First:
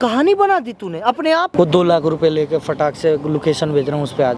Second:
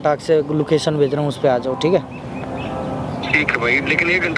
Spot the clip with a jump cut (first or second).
first